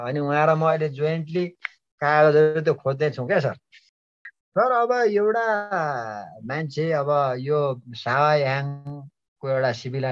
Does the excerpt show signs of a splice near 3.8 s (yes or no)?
yes